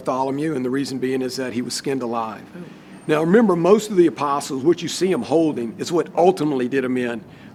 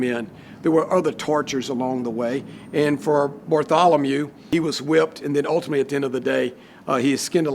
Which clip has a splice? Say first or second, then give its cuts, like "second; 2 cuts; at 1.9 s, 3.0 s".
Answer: second; 1 cut; at 4.5 s